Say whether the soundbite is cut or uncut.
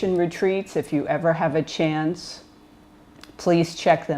cut